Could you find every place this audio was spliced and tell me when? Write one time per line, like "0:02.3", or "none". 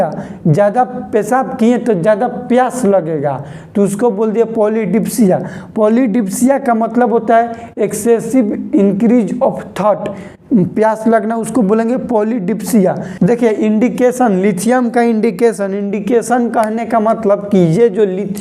0:13.1